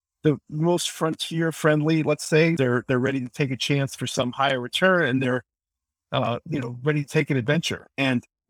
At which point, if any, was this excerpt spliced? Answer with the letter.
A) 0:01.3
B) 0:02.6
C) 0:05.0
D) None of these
B